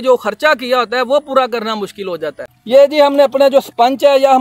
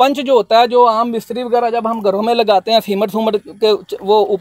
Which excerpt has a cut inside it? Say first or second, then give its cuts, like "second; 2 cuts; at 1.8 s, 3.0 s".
first; 1 cut; at 2.5 s